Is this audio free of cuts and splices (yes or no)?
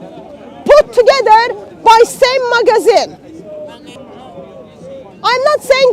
no